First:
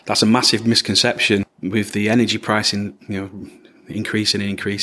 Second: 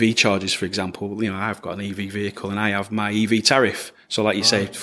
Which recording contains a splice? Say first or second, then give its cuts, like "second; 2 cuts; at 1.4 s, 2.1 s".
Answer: first; 1 cut; at 1.4 s